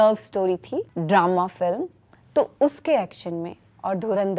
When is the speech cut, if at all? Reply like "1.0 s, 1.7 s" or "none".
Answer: 0.9 s

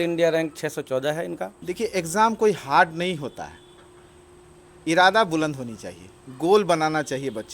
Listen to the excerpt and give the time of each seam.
1.6 s

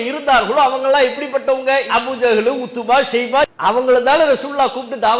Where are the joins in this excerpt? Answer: 3.5 s

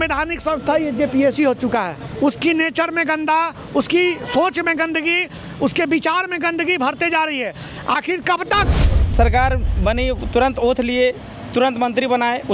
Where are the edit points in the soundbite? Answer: 2.0 s, 9.0 s

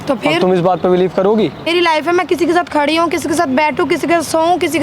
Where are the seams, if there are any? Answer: 1.7 s

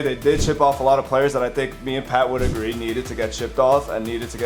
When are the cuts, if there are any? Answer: none

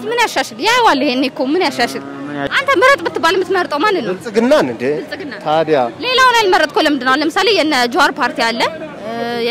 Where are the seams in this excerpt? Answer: 2.5 s

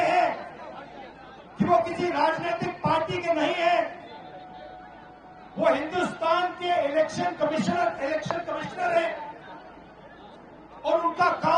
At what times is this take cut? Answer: none

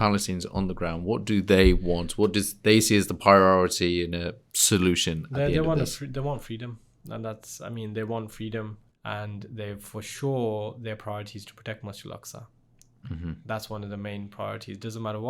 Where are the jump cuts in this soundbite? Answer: 8.8 s

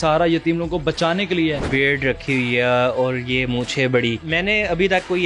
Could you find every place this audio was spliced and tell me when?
1.7 s, 4.3 s

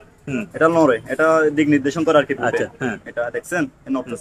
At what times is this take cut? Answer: none

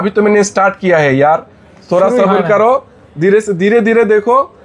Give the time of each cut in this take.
none

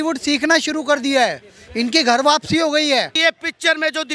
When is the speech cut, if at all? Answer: 3.1 s

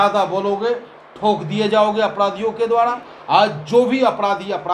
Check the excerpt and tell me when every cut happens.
3.1 s

